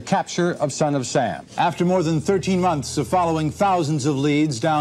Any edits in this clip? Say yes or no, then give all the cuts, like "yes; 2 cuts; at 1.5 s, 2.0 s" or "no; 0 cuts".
yes; 1 cut; at 1.4 s